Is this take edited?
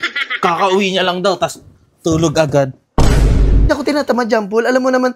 yes; 1 cut; at 3.7 s

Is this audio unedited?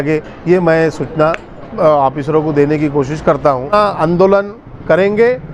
no; 1 cut; at 3.7 s

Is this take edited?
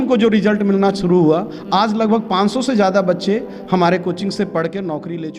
no; 0 cuts

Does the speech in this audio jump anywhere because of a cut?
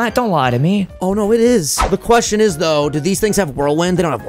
yes; 2 cuts; at 0.9 s, 2.0 s

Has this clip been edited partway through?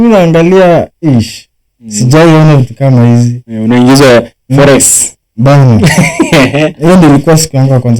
no; 0 cuts

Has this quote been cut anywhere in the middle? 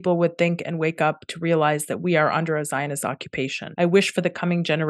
yes; 1 cut; at 3.6 s

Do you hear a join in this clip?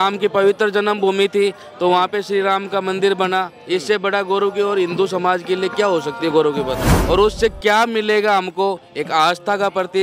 yes; 1 cut; at 6.9 s

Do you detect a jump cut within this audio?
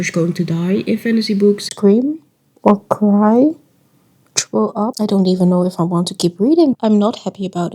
yes; 3 cuts; at 1.7 s, 4.9 s, 6.7 s

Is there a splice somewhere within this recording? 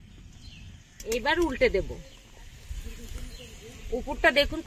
yes; 3 cuts; at 0.9 s, 2.6 s, 3.9 s

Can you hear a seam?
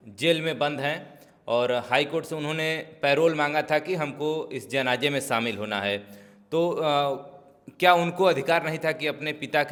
no; 0 cuts

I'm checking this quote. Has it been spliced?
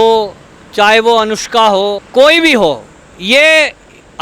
yes; 1 cut; at 2.0 s

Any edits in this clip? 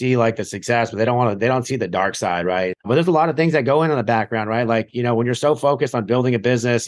yes; 1 cut; at 2.8 s

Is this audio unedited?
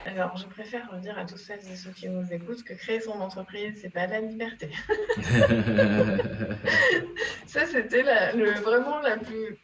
yes; 0 cuts

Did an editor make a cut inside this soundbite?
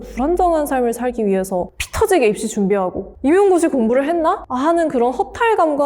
no; 0 cuts

